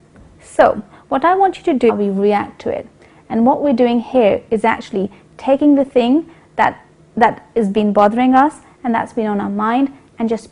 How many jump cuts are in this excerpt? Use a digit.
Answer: 0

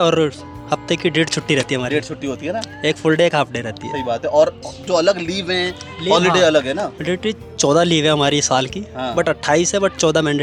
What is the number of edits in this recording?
0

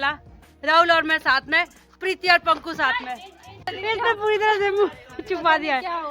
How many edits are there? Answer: 1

